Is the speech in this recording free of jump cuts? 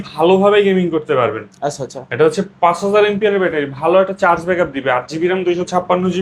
yes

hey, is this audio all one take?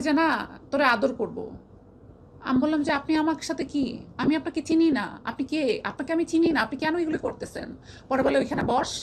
yes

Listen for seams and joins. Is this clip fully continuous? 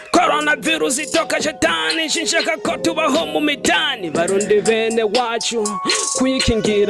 yes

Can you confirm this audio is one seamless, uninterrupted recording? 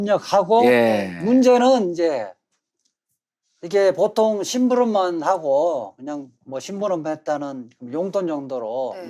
no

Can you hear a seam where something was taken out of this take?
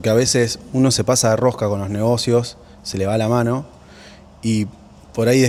no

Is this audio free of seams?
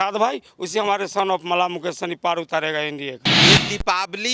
no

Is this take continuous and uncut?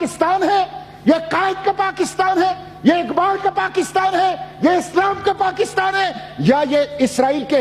yes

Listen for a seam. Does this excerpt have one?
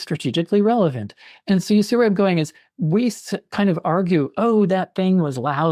no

